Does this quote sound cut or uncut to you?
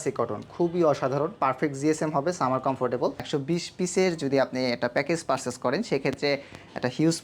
cut